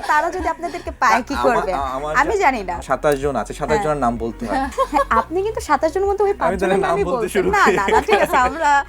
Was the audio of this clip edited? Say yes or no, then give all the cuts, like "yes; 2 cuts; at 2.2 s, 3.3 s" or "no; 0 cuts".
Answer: yes; 2 cuts; at 2.8 s, 4.7 s